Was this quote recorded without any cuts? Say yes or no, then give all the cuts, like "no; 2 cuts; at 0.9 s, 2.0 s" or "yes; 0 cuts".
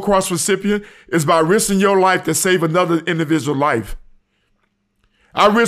yes; 0 cuts